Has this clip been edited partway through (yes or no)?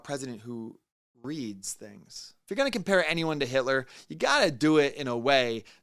yes